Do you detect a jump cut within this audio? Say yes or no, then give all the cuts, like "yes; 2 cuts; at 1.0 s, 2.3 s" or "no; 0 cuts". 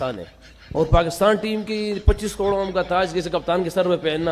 no; 0 cuts